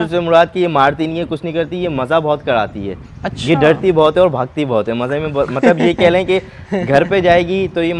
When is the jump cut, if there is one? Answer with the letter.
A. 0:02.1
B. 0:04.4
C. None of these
C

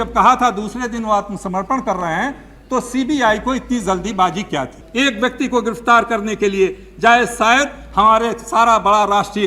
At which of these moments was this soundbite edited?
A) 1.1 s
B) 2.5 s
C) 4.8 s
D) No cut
C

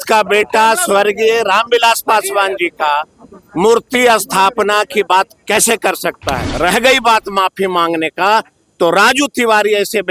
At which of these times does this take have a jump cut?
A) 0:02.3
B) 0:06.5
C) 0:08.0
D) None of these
B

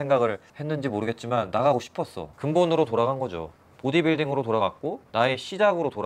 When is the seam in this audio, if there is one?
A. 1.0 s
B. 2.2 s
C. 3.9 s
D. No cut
B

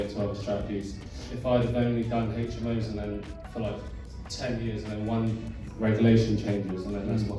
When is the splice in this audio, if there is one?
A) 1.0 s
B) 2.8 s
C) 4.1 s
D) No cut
A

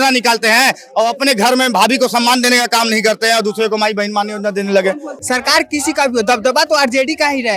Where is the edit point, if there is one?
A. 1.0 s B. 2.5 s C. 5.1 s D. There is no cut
C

